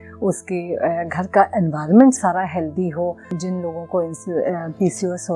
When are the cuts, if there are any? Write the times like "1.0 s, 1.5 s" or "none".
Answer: 3.4 s